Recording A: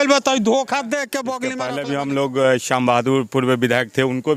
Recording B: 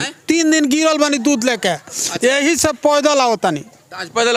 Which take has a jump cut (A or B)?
A